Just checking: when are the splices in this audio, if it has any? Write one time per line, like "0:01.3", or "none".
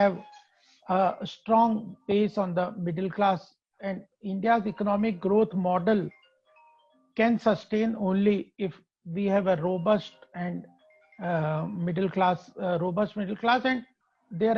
none